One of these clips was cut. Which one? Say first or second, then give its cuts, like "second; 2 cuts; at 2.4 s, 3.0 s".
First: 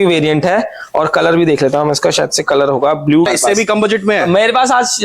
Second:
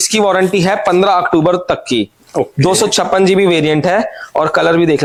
first; 1 cut; at 3.3 s